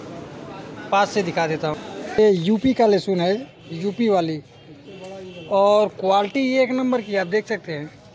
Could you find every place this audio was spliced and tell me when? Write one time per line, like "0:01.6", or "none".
0:02.2

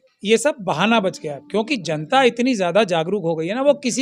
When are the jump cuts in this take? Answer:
none

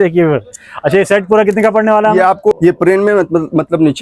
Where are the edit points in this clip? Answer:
0:02.6

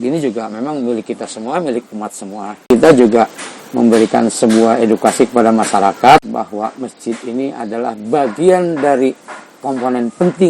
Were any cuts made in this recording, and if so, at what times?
0:02.7
0:06.3

